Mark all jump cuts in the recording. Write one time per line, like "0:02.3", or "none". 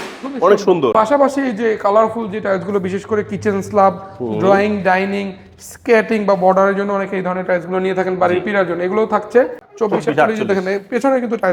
0:00.9
0:09.6